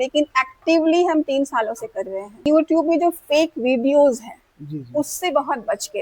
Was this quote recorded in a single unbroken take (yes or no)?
no